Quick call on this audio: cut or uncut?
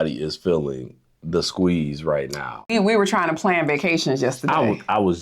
cut